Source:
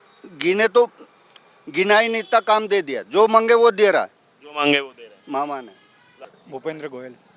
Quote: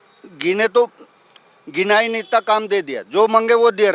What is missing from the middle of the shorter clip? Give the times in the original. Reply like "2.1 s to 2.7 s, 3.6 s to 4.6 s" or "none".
none